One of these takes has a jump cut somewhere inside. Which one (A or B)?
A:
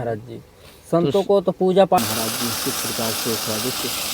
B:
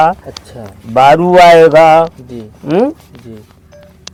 A